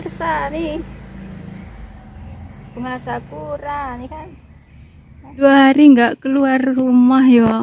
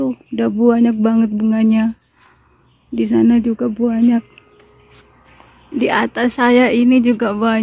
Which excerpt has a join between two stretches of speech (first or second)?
first